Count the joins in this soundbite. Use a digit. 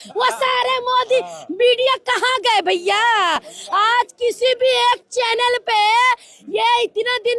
0